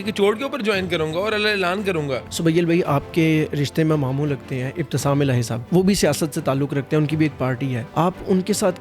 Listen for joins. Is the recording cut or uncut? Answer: cut